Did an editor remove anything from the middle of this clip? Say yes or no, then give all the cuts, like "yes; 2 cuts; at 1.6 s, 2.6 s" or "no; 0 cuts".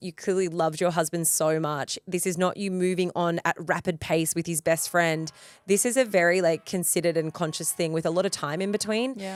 no; 0 cuts